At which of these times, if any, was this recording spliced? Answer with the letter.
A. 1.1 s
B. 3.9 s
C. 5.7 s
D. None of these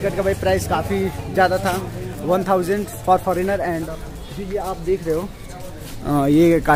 B